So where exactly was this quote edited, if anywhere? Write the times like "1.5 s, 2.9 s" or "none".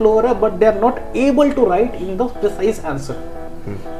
none